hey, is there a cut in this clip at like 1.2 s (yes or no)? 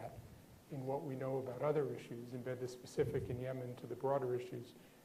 no